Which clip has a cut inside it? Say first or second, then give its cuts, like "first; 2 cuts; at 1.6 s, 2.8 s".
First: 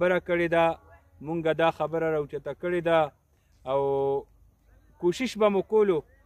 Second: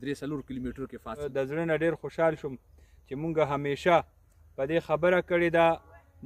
second; 1 cut; at 1.3 s